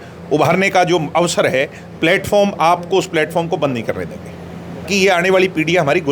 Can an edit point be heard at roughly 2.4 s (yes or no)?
no